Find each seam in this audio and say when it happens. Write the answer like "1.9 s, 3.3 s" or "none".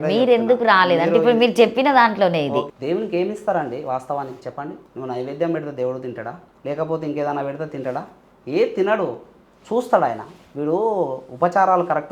2.7 s, 4.9 s, 6.5 s